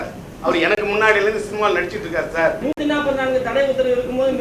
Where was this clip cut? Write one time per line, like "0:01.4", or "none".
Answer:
0:02.6